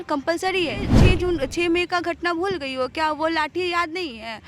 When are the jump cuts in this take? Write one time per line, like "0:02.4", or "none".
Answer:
0:00.9

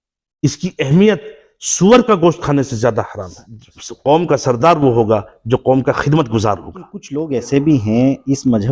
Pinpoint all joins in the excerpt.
0:03.9
0:07.2

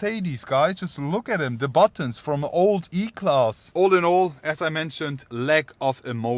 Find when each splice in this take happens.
none

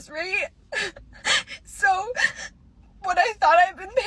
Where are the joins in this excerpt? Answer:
none

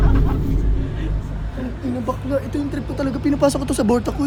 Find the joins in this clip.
none

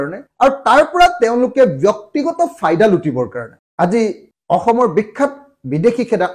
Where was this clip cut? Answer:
none

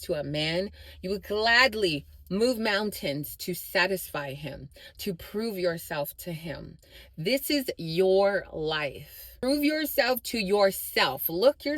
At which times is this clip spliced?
0:09.2

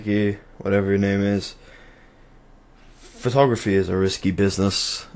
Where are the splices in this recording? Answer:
none

